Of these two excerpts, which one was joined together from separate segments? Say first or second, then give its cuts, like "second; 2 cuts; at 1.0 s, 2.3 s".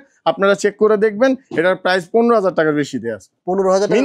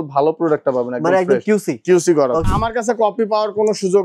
second; 1 cut; at 2.5 s